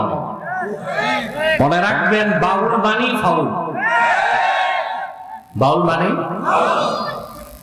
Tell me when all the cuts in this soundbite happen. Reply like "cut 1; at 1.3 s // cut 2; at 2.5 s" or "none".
cut 1; at 1.6 s